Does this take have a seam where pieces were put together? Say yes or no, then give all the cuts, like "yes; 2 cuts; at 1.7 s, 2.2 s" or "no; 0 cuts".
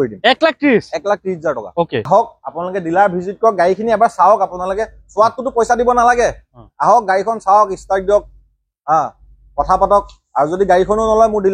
yes; 1 cut; at 2.1 s